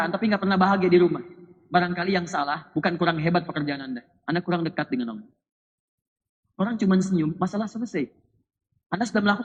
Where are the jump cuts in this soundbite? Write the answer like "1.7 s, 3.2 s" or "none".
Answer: none